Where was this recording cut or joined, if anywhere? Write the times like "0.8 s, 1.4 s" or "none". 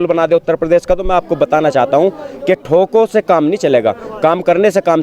none